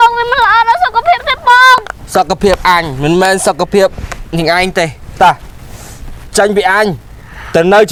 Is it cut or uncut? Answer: uncut